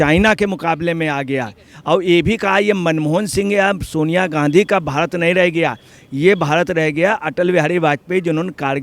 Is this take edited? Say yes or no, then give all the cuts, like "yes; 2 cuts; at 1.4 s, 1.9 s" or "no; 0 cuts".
yes; 1 cut; at 1.7 s